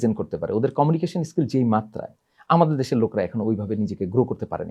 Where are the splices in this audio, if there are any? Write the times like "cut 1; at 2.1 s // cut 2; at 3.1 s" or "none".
none